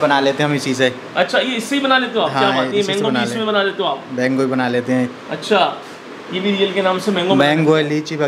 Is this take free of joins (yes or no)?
yes